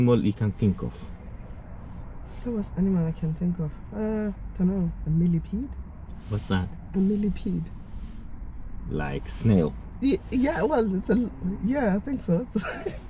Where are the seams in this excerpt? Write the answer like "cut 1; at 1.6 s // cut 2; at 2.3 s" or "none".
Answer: none

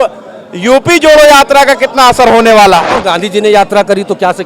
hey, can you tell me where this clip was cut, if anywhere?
cut 1; at 2.9 s

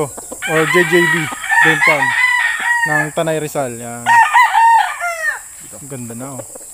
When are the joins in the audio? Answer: none

